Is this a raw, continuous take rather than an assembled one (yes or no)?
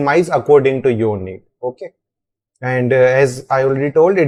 yes